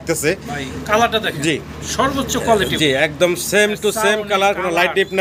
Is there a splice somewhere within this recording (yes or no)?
no